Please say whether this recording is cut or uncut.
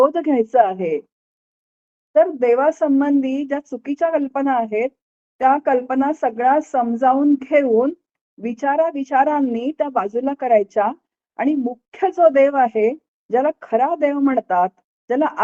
uncut